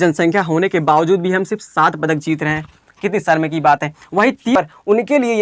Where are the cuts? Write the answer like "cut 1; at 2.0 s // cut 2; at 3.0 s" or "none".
cut 1; at 4.5 s